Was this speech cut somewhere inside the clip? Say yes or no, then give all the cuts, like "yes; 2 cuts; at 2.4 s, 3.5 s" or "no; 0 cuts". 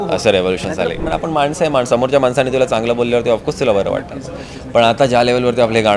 yes; 1 cut; at 1.1 s